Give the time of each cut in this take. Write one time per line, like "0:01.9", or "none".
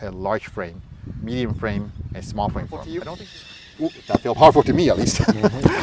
0:02.9